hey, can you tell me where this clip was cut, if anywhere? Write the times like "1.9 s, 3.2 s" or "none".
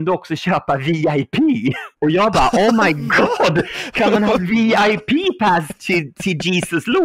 none